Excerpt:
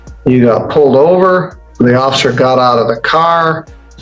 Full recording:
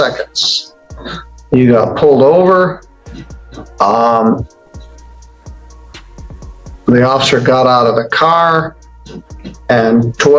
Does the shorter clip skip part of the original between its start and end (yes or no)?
yes